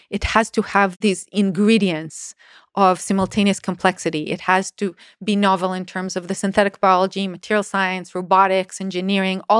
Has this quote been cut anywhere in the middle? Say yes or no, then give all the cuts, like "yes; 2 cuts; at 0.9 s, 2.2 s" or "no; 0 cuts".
yes; 1 cut; at 0.9 s